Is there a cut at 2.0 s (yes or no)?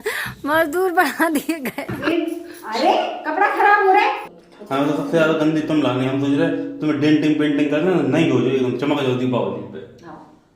yes